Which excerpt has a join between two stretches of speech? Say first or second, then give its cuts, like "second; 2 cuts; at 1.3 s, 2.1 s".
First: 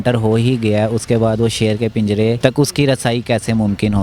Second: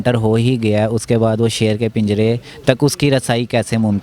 first; 1 cut; at 2.4 s